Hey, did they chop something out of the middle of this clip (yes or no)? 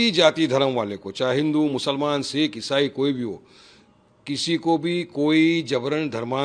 no